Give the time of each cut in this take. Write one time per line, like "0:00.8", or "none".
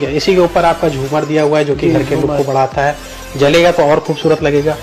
none